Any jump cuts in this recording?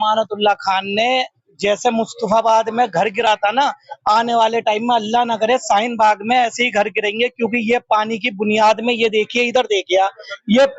no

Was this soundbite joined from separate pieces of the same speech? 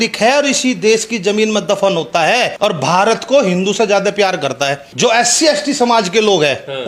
yes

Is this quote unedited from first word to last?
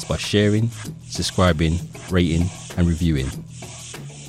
no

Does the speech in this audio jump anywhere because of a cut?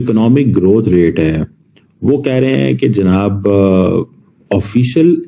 no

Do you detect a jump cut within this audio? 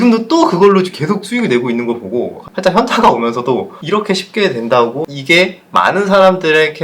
yes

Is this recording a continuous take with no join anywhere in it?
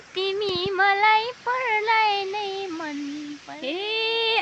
no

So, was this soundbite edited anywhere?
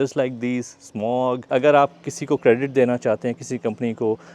yes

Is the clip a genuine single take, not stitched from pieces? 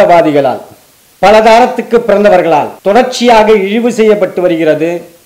no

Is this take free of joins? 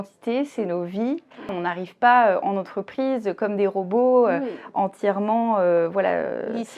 no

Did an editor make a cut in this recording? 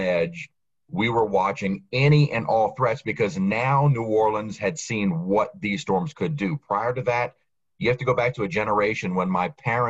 no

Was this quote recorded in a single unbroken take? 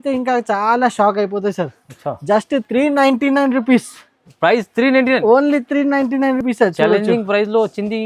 yes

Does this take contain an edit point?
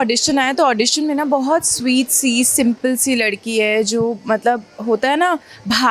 no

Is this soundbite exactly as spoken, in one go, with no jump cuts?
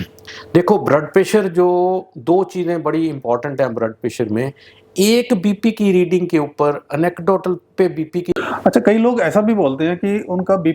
no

